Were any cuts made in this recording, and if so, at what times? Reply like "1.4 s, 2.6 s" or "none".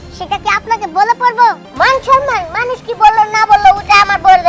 1.7 s